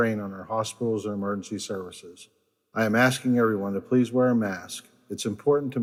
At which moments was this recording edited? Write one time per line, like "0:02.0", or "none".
none